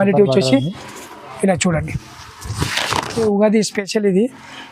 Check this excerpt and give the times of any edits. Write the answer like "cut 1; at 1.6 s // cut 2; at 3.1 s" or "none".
cut 1; at 3.2 s

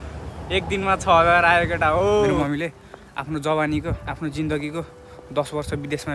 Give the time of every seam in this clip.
cut 1; at 2.4 s

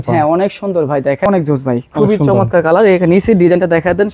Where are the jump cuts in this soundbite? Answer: cut 1; at 1.3 s

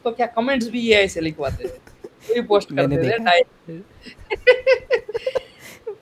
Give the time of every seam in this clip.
none

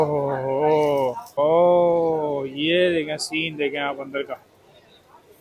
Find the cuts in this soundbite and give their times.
cut 1; at 1.2 s

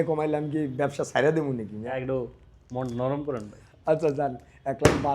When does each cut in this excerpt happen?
cut 1; at 2.0 s

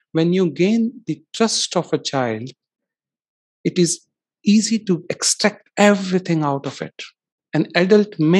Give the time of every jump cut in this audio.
none

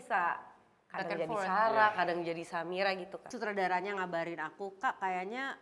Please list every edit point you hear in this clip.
cut 1; at 3.3 s

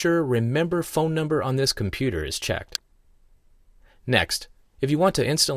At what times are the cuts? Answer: cut 1; at 4.3 s

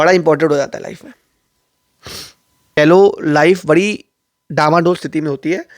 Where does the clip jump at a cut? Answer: cut 1; at 2.8 s

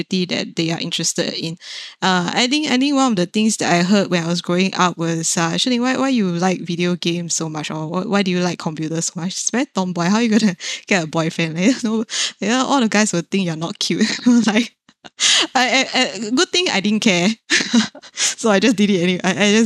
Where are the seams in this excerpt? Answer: none

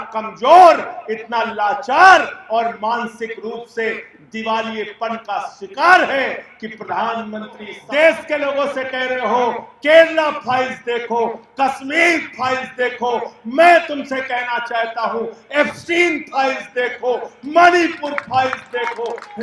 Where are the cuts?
cut 1; at 7.7 s

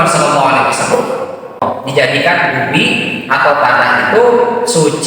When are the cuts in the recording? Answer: cut 1; at 1.6 s

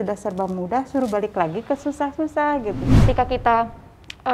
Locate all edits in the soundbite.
cut 1; at 2.9 s

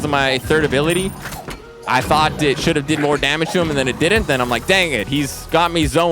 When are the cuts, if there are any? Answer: none

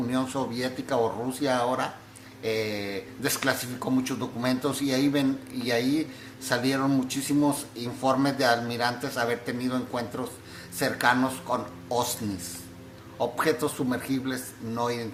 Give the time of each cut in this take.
none

